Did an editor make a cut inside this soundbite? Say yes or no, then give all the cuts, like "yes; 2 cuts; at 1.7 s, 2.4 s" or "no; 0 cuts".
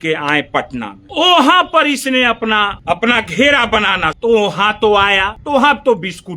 yes; 4 cuts; at 1.0 s, 2.7 s, 4.1 s, 5.3 s